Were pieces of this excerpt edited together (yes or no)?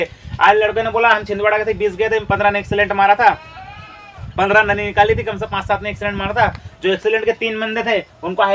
no